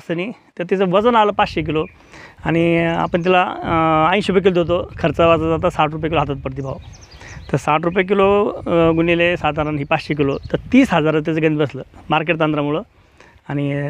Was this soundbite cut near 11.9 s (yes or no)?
no